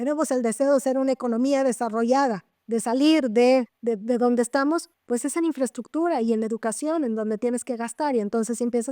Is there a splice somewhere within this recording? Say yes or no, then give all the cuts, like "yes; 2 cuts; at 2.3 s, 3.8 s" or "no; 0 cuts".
no; 0 cuts